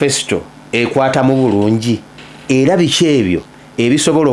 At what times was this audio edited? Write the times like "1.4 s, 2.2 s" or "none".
none